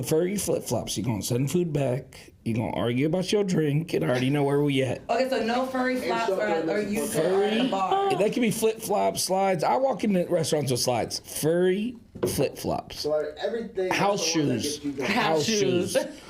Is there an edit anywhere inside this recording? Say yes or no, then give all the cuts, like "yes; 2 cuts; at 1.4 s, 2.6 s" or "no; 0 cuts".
no; 0 cuts